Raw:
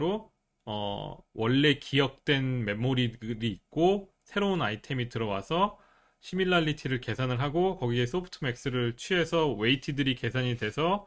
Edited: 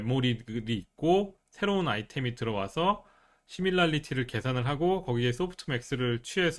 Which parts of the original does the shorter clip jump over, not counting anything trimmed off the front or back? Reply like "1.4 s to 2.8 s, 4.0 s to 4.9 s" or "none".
none